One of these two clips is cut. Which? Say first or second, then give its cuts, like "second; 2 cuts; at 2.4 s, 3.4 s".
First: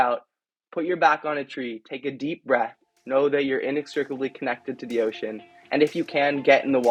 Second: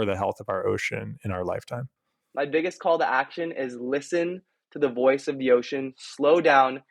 second; 1 cut; at 2.2 s